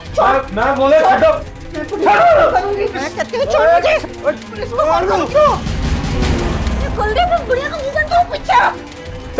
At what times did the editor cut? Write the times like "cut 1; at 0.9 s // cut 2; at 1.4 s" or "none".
cut 1; at 1.6 s